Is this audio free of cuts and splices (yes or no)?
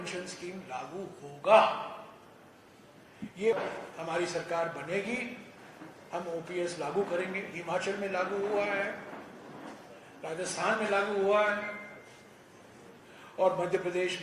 no